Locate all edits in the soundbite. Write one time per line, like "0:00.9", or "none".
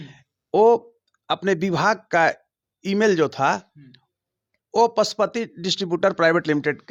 none